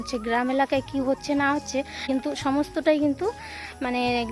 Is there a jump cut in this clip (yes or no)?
yes